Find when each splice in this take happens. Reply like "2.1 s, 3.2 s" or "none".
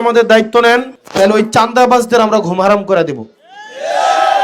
1.0 s